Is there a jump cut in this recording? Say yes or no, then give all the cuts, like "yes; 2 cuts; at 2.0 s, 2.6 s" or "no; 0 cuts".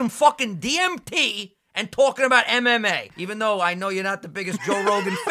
yes; 1 cut; at 3.1 s